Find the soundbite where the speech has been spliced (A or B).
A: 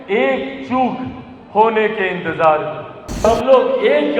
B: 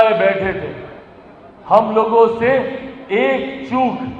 A